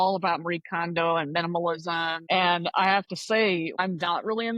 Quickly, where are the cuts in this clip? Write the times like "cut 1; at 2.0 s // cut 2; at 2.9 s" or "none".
cut 1; at 2.2 s // cut 2; at 3.8 s